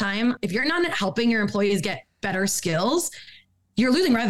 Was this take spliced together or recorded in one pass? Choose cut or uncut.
uncut